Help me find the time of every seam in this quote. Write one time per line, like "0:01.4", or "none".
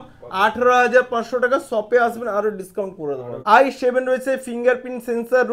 0:03.3